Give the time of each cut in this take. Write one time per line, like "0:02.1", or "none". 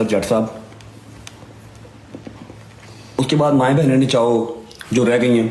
0:03.2